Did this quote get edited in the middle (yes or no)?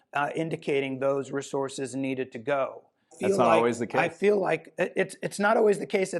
yes